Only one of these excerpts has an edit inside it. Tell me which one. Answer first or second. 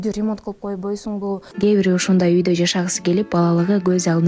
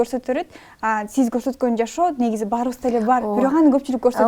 first